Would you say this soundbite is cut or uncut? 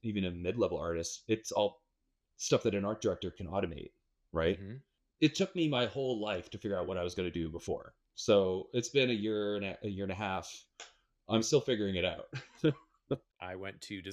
cut